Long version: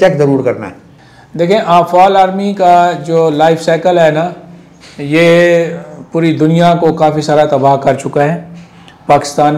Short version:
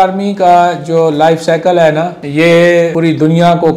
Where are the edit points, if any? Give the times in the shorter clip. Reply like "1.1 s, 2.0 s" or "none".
2.2 s, 2.9 s